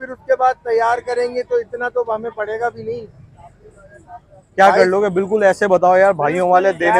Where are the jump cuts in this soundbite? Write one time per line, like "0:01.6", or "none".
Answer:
none